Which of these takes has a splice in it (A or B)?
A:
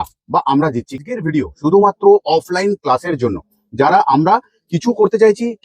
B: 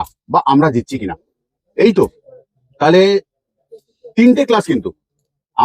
A